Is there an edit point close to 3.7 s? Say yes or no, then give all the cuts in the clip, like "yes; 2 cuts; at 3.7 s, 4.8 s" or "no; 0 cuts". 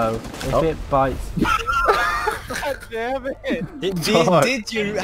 no; 0 cuts